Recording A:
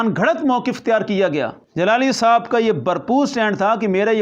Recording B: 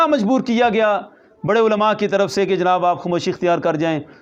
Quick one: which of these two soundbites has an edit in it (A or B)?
A